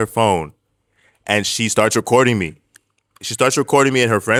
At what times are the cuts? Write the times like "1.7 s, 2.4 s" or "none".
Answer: none